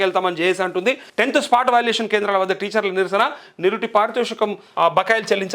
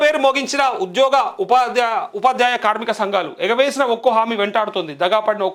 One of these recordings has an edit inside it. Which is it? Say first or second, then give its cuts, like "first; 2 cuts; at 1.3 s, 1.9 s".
first; 2 cuts; at 1.1 s, 4.6 s